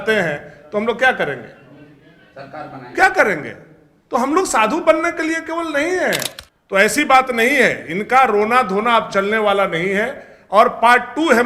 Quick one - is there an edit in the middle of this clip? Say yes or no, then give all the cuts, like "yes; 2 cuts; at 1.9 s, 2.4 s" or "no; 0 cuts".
yes; 1 cut; at 6.4 s